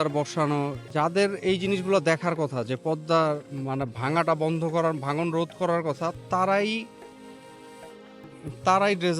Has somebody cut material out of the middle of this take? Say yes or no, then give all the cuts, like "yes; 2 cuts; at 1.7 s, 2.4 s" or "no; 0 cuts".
yes; 1 cut; at 0.9 s